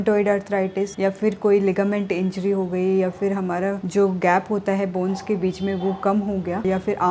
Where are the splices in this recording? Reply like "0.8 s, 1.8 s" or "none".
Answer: none